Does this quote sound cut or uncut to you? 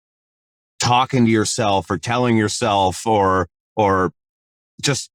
uncut